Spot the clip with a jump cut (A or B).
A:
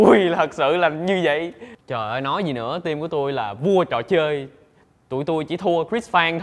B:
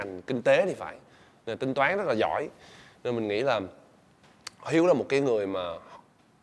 A